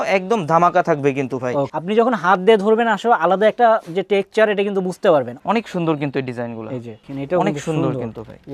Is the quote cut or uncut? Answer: cut